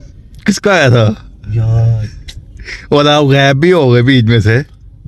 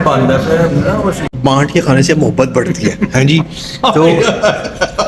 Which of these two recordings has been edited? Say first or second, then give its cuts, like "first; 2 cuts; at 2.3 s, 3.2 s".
second; 1 cut; at 1.3 s